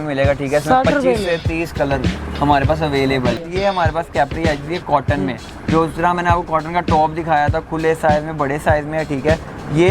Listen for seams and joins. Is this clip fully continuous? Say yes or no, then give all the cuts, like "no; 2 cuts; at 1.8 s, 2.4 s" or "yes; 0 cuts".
no; 1 cut; at 3.4 s